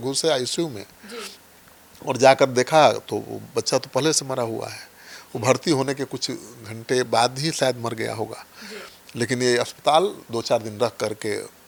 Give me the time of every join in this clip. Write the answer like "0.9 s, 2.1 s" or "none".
none